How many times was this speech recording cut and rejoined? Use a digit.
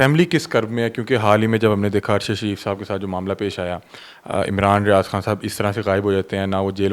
0